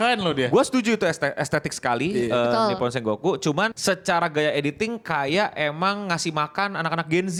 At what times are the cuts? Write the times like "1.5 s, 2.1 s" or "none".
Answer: none